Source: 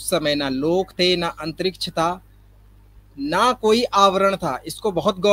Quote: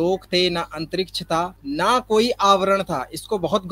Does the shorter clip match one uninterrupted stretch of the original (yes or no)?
no